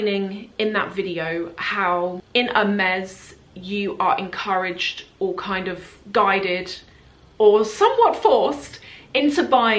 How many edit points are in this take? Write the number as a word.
one